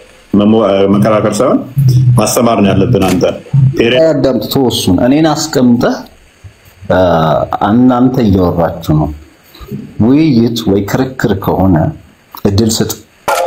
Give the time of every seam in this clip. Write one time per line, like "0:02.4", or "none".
0:04.0